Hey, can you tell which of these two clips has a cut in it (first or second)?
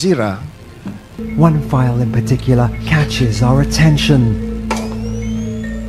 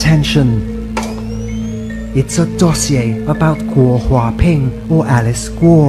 first